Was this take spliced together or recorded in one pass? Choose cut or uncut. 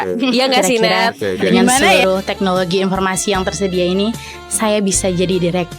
cut